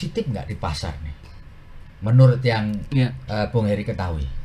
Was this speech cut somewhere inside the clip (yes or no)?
no